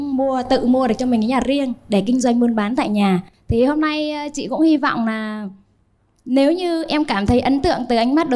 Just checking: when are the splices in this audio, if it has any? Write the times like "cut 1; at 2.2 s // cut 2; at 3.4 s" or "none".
none

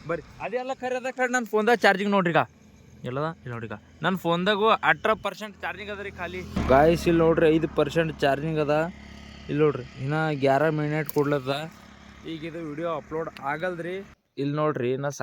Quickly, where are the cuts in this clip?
cut 1; at 6.5 s // cut 2; at 14.3 s

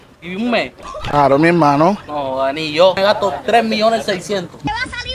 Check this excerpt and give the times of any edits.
cut 1; at 3.0 s

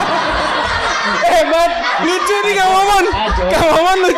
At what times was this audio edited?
none

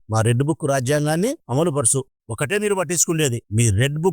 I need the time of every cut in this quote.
cut 1; at 2.2 s

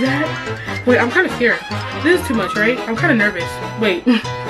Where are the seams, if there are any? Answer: none

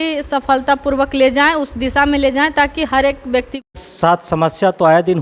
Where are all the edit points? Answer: cut 1; at 3.8 s

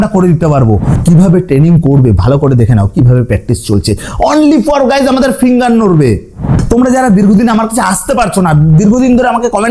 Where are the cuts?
cut 1; at 0.9 s // cut 2; at 6.5 s

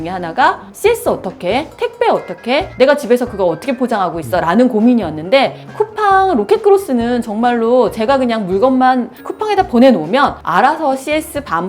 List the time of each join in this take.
none

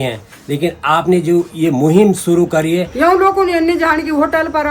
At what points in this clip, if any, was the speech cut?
cut 1; at 2.9 s

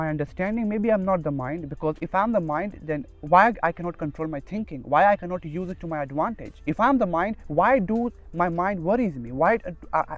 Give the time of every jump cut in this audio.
none

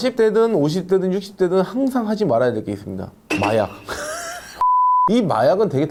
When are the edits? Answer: none

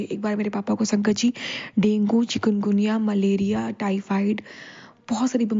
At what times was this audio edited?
none

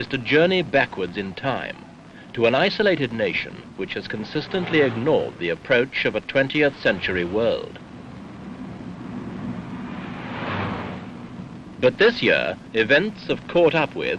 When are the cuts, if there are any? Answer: cut 1; at 6.8 s

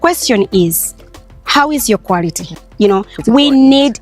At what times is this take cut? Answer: cut 1; at 2.5 s

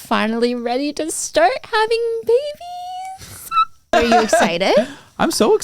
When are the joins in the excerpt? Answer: cut 1; at 3.8 s

